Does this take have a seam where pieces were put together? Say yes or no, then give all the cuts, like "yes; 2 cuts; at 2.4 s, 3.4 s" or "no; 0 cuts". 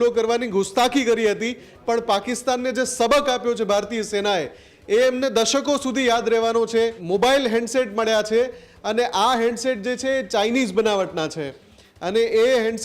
yes; 1 cut; at 7.0 s